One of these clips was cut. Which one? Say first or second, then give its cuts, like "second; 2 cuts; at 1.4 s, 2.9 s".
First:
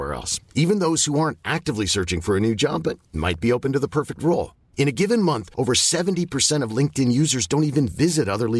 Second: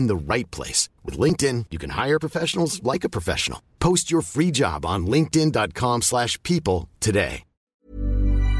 second; 1 cut; at 7.6 s